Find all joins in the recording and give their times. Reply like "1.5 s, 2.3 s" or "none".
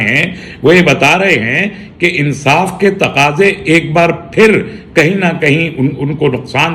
none